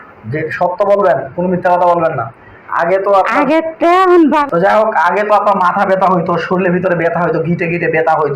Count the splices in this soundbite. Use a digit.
1